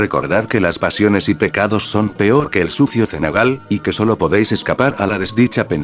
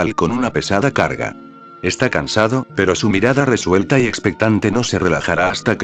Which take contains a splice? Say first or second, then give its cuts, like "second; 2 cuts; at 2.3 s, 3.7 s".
first; 1 cut; at 1.3 s